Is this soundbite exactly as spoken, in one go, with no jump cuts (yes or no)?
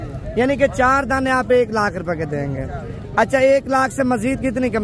yes